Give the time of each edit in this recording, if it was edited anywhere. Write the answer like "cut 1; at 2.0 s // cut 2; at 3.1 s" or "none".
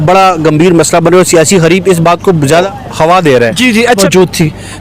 cut 1; at 2.7 s // cut 2; at 4.0 s

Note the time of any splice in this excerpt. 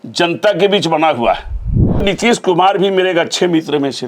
cut 1; at 2.0 s

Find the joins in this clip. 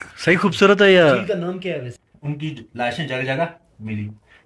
cut 1; at 2.0 s

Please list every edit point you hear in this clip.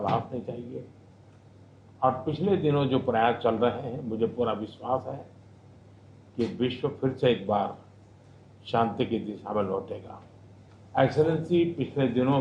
cut 1; at 3.8 s

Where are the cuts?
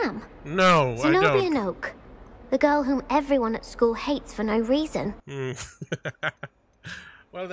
none

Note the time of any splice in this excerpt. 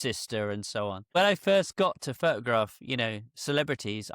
cut 1; at 1.1 s

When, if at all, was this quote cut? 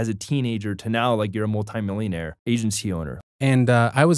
cut 1; at 3.1 s

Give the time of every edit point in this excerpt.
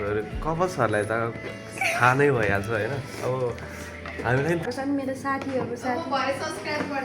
cut 1; at 4.7 s

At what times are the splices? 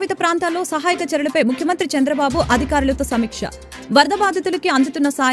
none

